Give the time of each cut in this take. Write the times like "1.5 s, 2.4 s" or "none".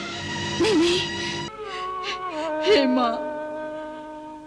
1.5 s